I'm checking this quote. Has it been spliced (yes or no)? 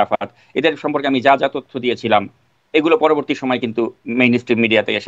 no